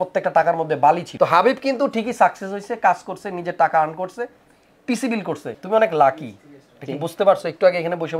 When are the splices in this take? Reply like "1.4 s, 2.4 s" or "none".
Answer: 1.1 s, 5.5 s

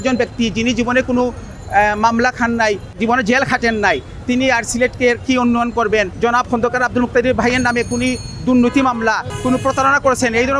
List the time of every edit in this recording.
2.9 s, 6.1 s, 9.3 s

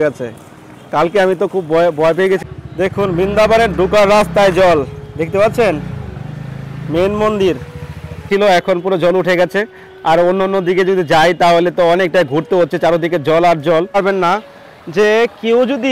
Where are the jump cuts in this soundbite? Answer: 2.5 s, 8.3 s, 14.0 s

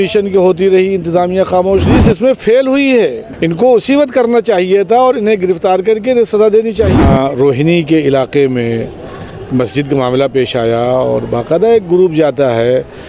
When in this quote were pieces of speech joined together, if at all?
1.9 s, 3.3 s, 7.0 s

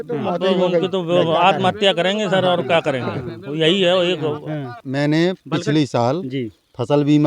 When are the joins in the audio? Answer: 4.8 s

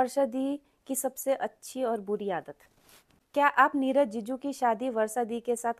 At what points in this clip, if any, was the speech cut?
3.2 s

